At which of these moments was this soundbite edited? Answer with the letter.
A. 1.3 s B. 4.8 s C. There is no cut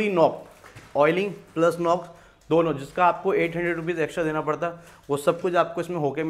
C